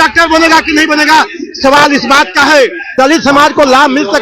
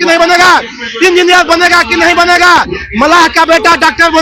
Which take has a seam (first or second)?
first